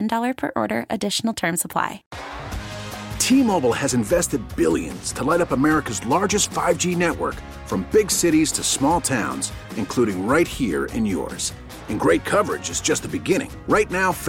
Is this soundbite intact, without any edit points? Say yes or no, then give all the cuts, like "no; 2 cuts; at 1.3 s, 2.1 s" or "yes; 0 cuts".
no; 1 cut; at 2.1 s